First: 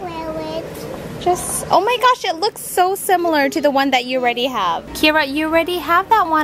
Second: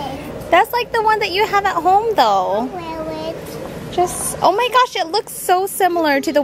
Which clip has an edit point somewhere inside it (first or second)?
first